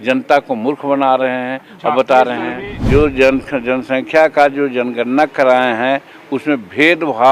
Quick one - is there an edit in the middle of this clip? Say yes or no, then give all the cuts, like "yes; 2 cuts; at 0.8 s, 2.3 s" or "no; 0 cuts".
yes; 1 cut; at 2.7 s